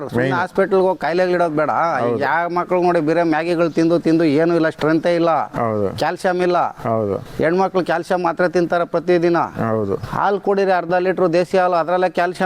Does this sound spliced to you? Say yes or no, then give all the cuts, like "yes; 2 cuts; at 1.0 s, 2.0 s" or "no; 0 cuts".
no; 0 cuts